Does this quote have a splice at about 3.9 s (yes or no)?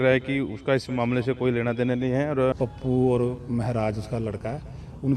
no